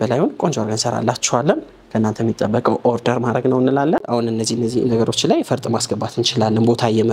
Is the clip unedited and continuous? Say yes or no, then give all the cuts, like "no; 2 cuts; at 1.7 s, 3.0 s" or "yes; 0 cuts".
no; 1 cut; at 4.0 s